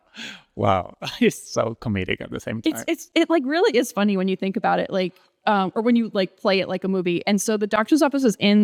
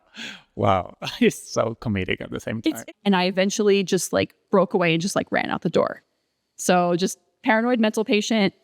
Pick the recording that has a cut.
second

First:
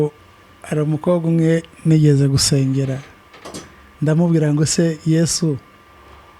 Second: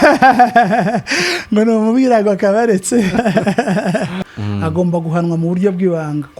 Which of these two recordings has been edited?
second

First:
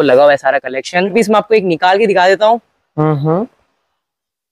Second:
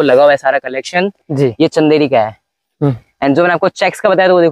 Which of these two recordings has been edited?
first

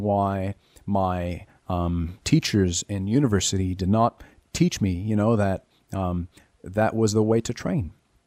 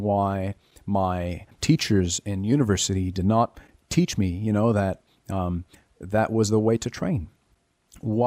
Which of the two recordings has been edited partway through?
second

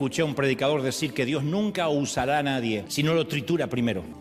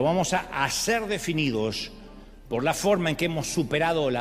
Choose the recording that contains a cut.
first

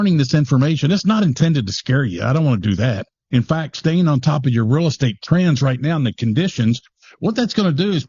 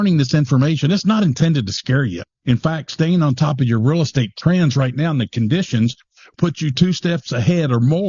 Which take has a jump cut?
second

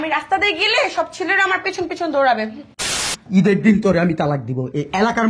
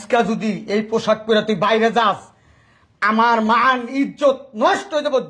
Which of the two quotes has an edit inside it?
first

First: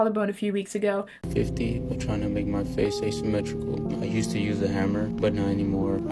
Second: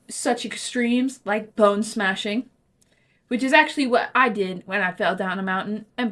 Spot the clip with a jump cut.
first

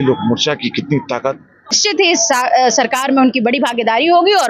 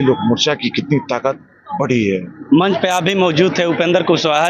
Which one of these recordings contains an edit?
first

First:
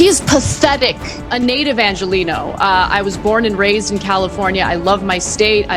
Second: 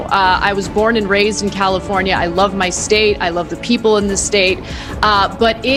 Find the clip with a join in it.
first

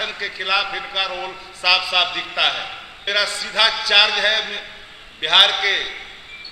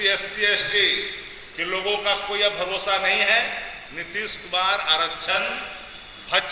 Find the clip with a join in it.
first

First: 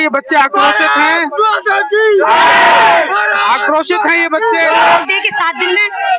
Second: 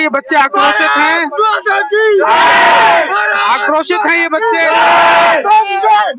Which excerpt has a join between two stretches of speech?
first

